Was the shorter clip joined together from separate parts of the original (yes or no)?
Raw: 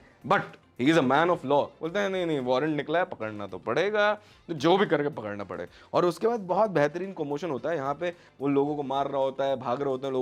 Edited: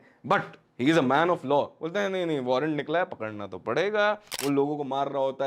yes